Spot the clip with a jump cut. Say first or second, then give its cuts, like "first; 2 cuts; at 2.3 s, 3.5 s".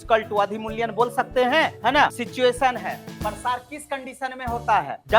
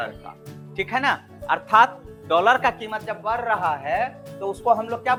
first; 1 cut; at 2.2 s